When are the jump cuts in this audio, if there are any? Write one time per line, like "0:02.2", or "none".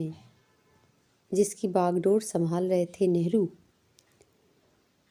none